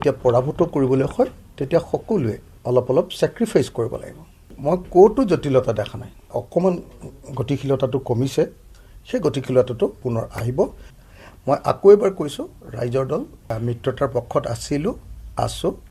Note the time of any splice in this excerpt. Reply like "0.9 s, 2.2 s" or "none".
2.5 s, 4.5 s, 6.4 s, 10.9 s